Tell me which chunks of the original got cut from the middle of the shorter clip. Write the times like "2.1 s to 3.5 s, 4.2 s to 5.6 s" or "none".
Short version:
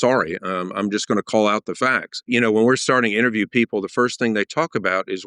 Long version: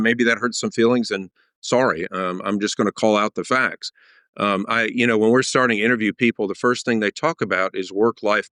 3.9 s to 4.9 s